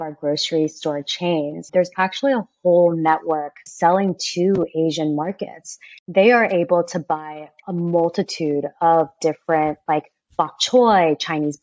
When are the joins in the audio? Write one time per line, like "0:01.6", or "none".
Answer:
0:01.6
0:03.7
0:05.9